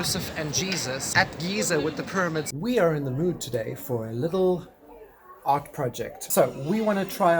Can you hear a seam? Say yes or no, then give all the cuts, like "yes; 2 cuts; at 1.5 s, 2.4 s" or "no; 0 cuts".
yes; 3 cuts; at 1.1 s, 2.5 s, 6.2 s